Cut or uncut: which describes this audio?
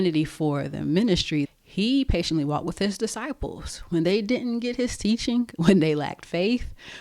cut